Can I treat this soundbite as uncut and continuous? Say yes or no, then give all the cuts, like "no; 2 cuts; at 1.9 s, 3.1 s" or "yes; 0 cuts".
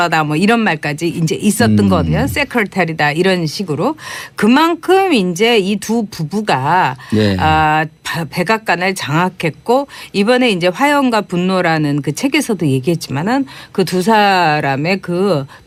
yes; 0 cuts